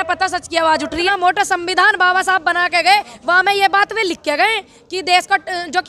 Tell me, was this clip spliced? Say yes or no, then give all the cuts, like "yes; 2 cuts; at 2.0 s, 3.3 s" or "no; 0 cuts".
yes; 1 cut; at 1.0 s